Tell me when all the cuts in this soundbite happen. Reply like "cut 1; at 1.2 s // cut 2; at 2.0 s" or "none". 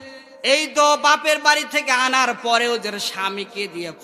none